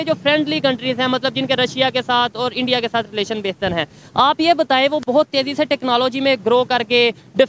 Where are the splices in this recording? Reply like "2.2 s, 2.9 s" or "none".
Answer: none